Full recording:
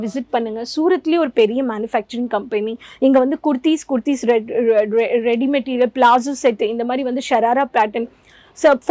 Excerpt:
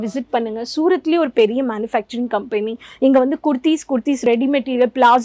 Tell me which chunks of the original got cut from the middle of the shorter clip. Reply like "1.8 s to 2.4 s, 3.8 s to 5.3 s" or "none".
4.2 s to 5.2 s

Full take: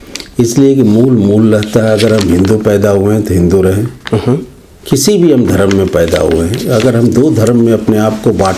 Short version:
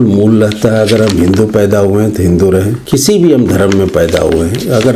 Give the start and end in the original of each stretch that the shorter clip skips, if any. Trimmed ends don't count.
3.9 s to 4.8 s

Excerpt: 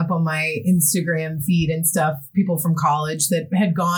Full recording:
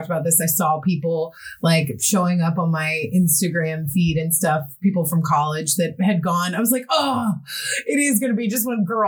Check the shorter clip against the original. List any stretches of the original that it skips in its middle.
none

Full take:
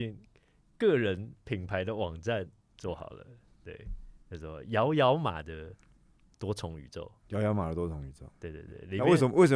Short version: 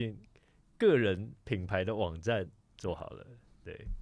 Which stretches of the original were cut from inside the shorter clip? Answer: none

